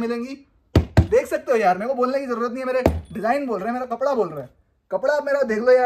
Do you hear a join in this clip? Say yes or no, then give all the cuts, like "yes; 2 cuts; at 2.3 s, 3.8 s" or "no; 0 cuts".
no; 0 cuts